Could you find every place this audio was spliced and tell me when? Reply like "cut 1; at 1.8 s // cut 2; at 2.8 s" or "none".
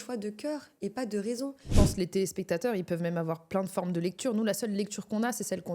cut 1; at 1.7 s